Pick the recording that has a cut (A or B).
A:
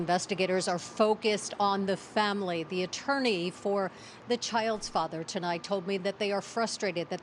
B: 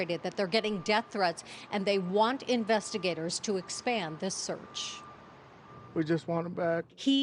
A